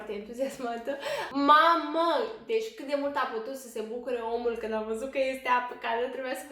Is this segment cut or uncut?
cut